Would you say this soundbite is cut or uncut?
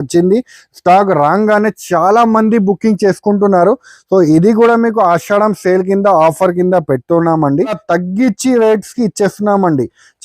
cut